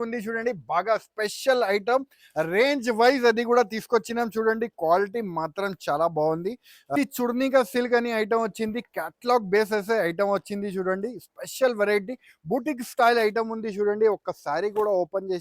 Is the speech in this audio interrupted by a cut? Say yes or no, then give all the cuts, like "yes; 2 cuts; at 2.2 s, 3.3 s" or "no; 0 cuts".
yes; 1 cut; at 6.9 s